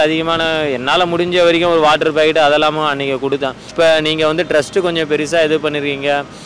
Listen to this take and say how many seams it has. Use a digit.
1